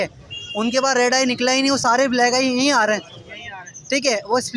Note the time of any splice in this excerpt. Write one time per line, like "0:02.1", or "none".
none